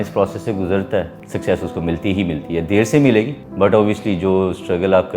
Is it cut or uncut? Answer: cut